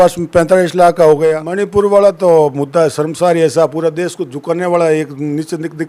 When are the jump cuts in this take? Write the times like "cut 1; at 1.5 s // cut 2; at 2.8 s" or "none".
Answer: cut 1; at 1.4 s